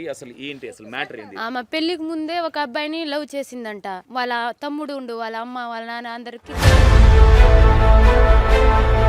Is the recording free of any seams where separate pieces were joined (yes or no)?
no